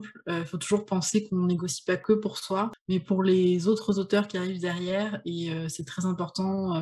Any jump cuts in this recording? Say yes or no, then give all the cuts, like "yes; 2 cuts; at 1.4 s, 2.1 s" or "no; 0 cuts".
yes; 1 cut; at 2.3 s